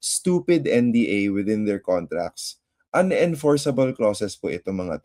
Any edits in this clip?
no; 0 cuts

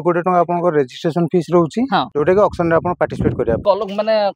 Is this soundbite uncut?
no; 2 cuts; at 2.1 s, 3.6 s

